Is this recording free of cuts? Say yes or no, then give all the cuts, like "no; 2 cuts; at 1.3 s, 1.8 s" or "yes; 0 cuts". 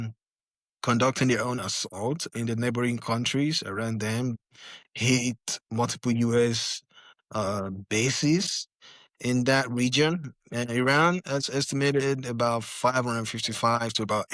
no; 1 cut; at 4.3 s